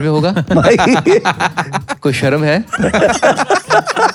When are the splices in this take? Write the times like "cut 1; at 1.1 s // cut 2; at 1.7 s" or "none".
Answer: none